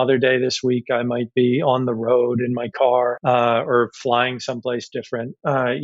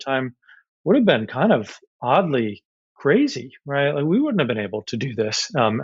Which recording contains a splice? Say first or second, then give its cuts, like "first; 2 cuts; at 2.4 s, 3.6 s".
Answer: first; 1 cut; at 3.2 s